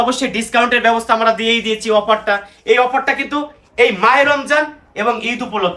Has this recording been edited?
no; 0 cuts

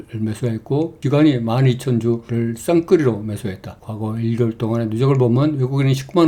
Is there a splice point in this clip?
no; 0 cuts

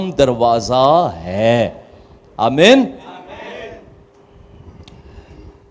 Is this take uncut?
yes; 0 cuts

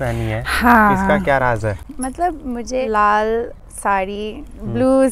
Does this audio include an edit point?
yes; 3 cuts; at 1.9 s, 2.8 s, 3.6 s

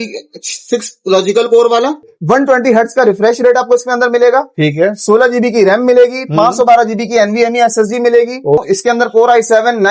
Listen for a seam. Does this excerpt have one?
yes; 2 cuts; at 2.1 s, 8.6 s

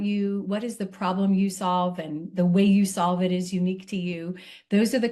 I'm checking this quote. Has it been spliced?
no; 0 cuts

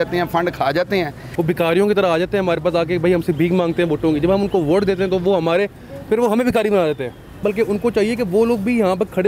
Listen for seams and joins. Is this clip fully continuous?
no; 2 cuts; at 1.2 s, 7.4 s

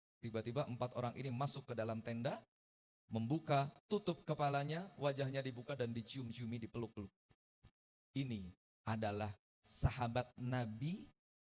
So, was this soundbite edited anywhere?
yes; 1 cut; at 8.0 s

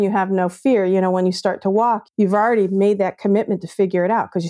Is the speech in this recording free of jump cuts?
no; 1 cut; at 2.0 s

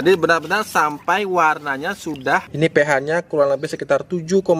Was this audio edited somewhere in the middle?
yes; 1 cut; at 2.5 s

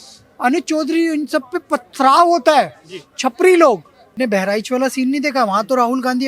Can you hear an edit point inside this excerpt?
yes; 1 cut; at 4.0 s

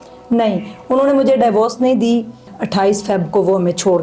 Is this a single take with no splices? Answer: no; 1 cut; at 2.5 s

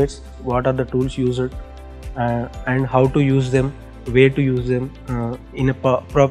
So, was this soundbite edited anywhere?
no; 0 cuts

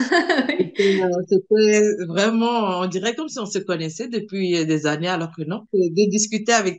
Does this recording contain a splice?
yes; 1 cut; at 5.6 s

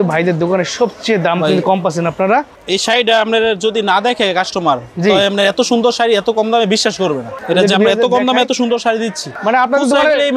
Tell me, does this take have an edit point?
no; 0 cuts

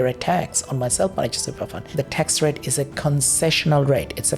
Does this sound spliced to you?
yes; 1 cut; at 1.8 s

